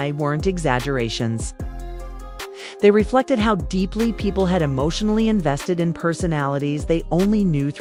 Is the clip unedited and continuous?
yes; 0 cuts

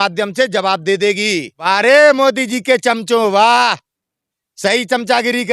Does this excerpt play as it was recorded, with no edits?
no; 1 cut; at 1.6 s

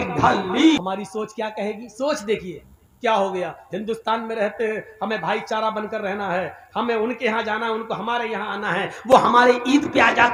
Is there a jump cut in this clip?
no; 0 cuts

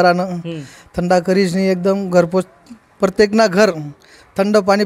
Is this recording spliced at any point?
no; 0 cuts

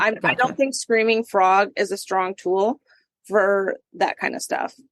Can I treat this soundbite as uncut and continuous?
no; 1 cut; at 3.9 s

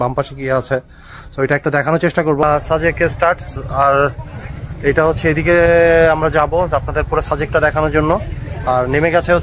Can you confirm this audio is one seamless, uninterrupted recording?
no; 1 cut; at 2.4 s

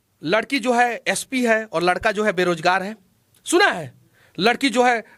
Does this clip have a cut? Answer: no; 0 cuts

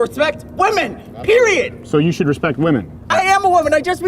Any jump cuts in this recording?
yes; 1 cut; at 3.1 s

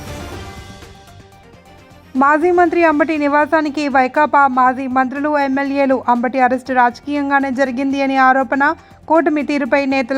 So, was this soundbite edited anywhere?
yes; 1 cut; at 1.3 s

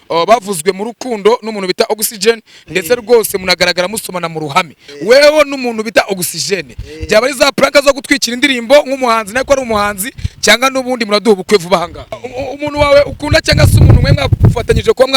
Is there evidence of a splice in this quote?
yes; 2 cuts; at 4.8 s, 12.2 s

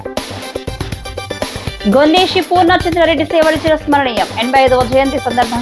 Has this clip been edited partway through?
no; 0 cuts

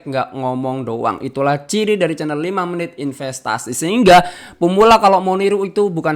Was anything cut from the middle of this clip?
no; 0 cuts

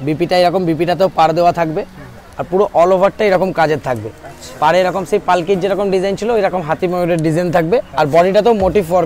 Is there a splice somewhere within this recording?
no; 0 cuts

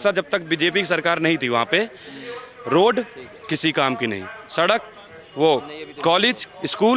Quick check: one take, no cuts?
yes; 0 cuts

